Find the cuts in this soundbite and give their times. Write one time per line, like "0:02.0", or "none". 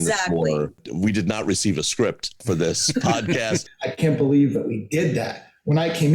0:00.8
0:03.8